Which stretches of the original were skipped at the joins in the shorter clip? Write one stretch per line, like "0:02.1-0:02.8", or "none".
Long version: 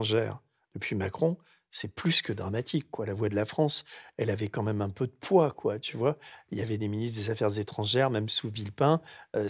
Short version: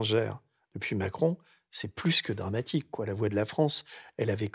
none

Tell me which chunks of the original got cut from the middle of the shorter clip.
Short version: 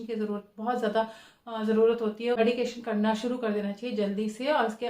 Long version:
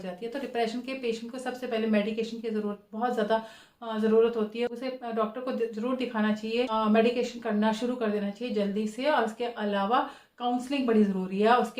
0:04.7-0:07.0

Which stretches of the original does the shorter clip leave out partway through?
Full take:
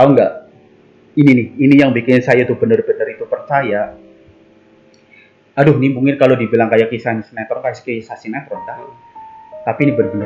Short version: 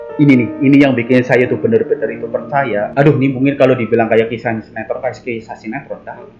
0:03.9-0:05.5

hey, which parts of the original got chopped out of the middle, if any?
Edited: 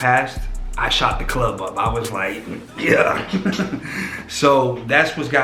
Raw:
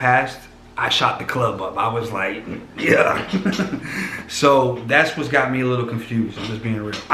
none

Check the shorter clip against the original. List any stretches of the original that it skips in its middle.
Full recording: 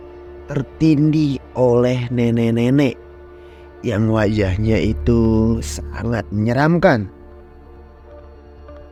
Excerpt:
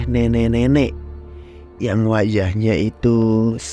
none

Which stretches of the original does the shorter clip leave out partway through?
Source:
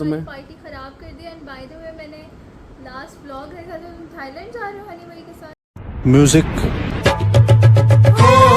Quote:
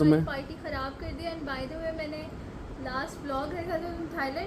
none

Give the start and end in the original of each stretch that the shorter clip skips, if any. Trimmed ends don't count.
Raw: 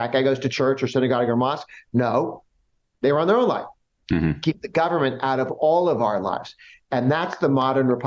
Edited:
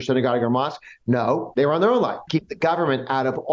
0:02.3-0:02.9
0:03.7-0:04.4

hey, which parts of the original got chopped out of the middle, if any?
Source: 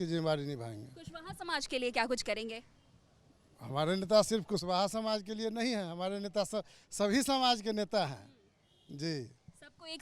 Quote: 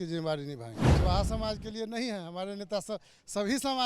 0:01.0-0:04.6

